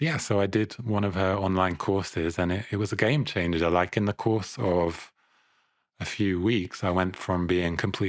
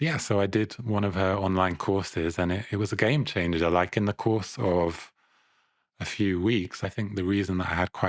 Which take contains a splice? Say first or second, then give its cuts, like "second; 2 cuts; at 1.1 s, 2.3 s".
second; 1 cut; at 6.8 s